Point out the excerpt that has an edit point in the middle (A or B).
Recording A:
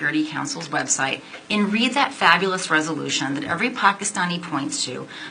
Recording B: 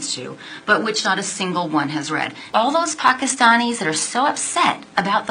B